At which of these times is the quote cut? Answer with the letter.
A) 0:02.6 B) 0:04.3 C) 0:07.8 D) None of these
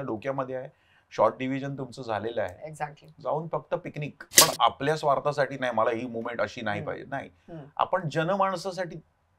B